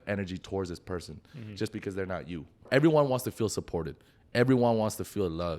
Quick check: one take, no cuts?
no; 1 cut; at 2.7 s

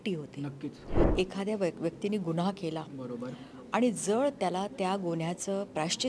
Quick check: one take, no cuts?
no; 1 cut; at 1.0 s

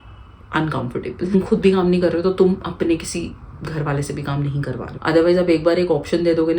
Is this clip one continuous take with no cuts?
no; 2 cuts; at 1.3 s, 4.9 s

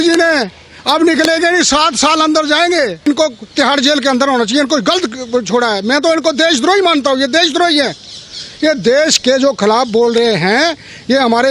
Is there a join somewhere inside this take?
yes; 1 cut; at 3.0 s

